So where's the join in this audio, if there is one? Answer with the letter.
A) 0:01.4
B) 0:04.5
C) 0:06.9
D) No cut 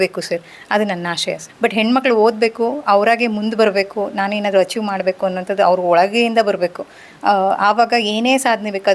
A